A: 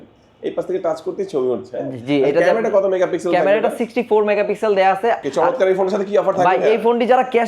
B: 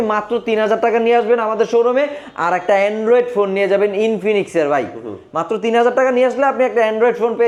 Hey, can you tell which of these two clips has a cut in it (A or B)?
A